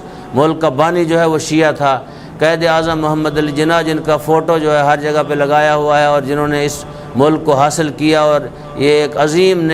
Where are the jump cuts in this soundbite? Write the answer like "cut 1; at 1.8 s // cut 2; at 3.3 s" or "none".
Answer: none